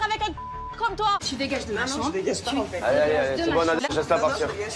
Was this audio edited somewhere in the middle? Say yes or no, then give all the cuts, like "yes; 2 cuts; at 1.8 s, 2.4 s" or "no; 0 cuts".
yes; 1 cut; at 1.3 s